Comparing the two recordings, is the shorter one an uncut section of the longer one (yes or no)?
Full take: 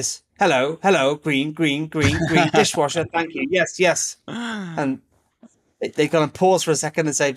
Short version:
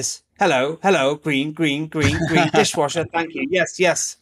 yes